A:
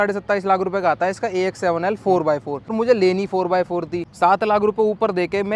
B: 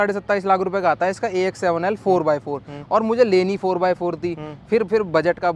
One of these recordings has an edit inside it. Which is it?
A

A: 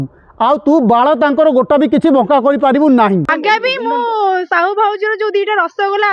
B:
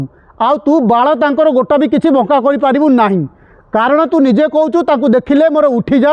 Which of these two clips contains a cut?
A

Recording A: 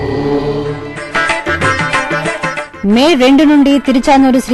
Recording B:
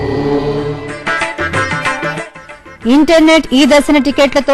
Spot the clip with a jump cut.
A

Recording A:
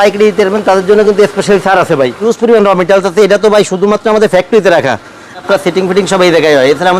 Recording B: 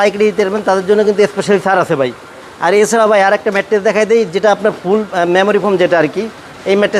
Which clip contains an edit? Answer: A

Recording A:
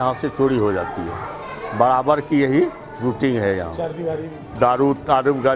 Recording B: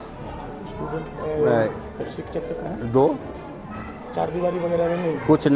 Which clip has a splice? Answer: A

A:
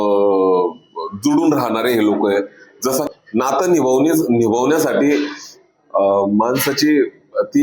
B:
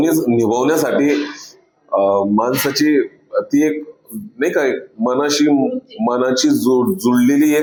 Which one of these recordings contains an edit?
A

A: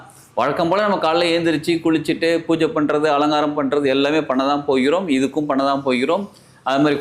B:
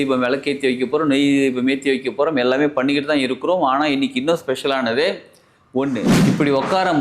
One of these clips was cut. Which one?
B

